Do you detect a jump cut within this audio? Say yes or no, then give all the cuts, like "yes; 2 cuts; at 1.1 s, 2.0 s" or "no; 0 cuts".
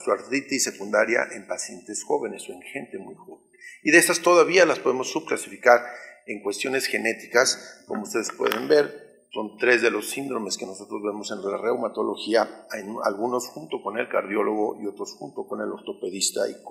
no; 0 cuts